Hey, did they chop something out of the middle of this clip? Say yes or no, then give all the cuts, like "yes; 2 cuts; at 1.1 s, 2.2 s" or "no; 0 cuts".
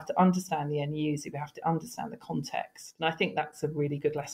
yes; 1 cut; at 2.9 s